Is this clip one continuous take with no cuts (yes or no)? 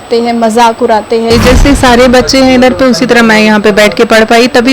no